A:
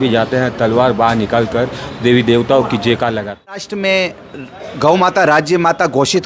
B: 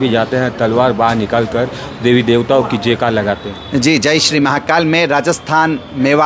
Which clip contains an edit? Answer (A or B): A